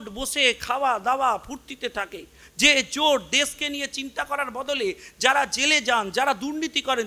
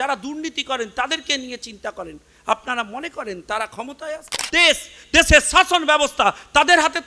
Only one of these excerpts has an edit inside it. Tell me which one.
second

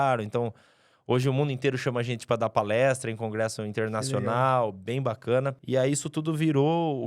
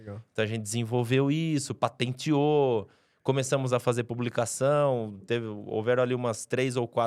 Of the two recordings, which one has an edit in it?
first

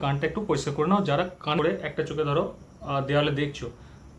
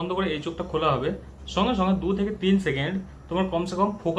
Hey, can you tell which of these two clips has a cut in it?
first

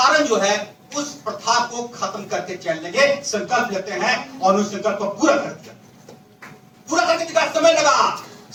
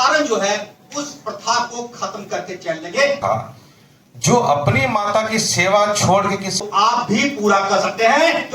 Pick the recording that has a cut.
second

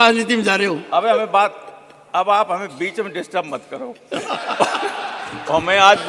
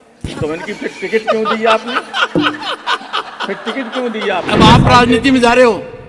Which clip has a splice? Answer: second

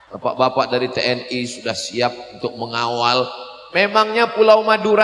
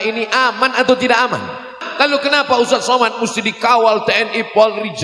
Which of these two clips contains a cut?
second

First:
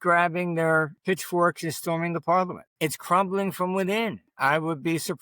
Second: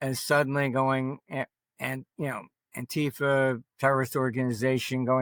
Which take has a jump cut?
first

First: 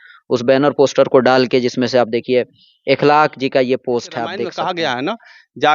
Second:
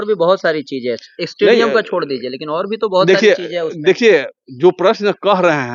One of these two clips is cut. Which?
first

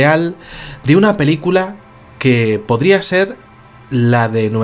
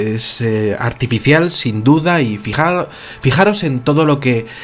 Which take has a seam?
second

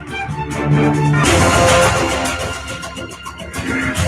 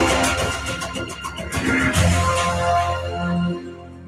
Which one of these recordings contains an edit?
first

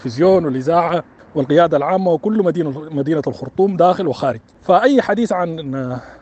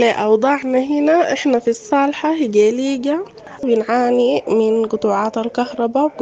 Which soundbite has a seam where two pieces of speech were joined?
first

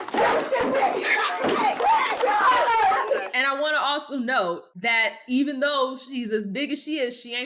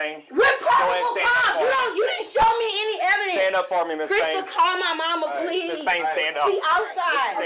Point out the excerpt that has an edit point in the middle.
first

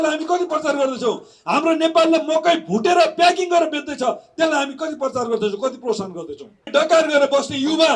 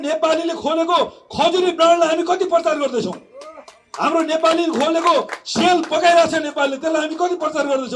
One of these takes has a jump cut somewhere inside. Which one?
first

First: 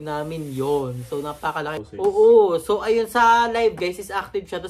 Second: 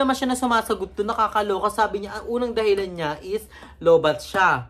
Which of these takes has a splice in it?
first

